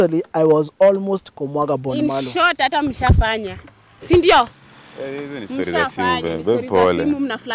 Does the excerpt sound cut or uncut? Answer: uncut